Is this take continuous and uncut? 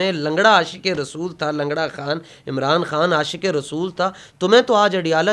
yes; 0 cuts

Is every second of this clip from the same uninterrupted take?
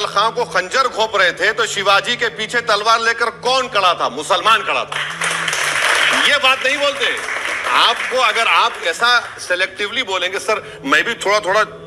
yes; 0 cuts

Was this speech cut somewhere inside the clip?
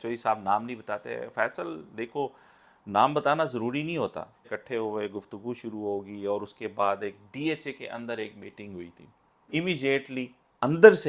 yes; 2 cuts; at 4.5 s, 9.5 s

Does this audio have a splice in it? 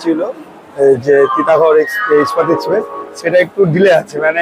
no; 0 cuts

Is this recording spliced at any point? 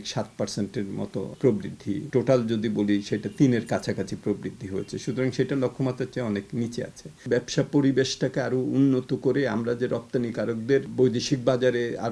yes; 4 cuts; at 1.3 s, 2.0 s, 7.2 s, 10.9 s

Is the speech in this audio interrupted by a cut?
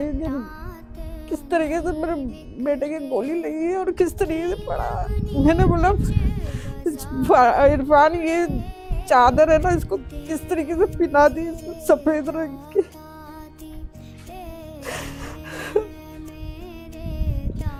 no; 0 cuts

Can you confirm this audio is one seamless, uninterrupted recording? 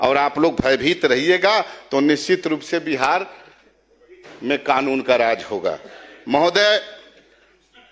yes; 0 cuts

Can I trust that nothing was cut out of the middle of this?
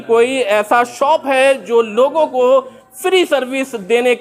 yes; 0 cuts

